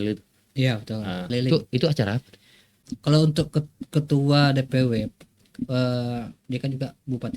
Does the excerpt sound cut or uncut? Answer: cut